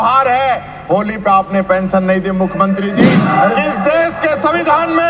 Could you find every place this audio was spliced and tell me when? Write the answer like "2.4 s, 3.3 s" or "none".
3.2 s